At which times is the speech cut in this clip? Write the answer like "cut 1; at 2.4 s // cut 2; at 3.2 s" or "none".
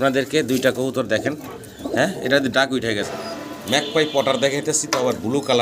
cut 1; at 3.1 s